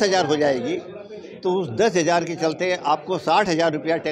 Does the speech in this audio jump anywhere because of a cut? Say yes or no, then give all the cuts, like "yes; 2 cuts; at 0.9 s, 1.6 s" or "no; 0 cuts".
no; 0 cuts